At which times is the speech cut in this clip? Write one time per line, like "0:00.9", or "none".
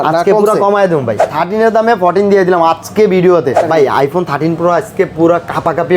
0:01.3
0:03.6